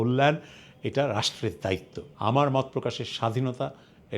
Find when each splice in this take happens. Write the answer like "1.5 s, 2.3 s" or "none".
2.0 s